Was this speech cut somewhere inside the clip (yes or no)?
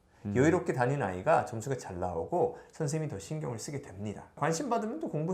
yes